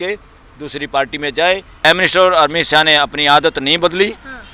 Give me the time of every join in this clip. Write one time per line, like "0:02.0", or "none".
0:01.7